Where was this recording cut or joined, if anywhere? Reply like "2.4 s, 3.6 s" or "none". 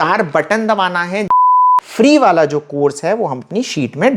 1.4 s